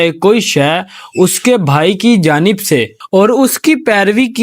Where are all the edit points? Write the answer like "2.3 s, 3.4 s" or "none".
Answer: 2.9 s